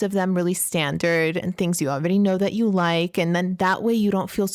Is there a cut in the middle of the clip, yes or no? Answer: no